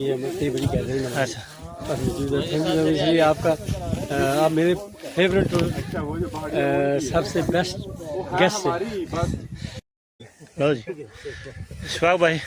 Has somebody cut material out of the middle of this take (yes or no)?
yes